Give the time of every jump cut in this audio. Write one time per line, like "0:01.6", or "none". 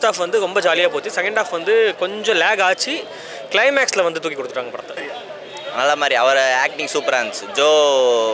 0:05.0

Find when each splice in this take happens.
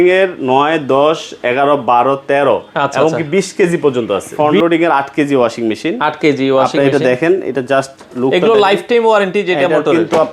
0:04.3

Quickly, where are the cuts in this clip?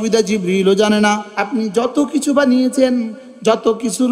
0:01.3

